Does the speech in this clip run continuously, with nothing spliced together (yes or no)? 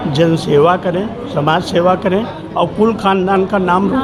yes